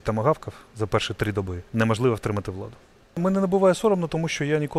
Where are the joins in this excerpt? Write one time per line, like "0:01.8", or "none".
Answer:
0:01.6
0:03.2